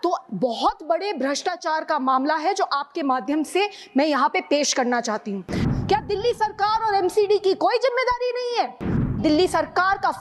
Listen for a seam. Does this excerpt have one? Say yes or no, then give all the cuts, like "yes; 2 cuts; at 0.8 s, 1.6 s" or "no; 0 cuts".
yes; 2 cuts; at 5.7 s, 9.2 s